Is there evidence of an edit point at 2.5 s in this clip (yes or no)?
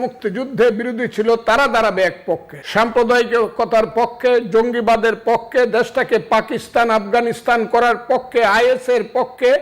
yes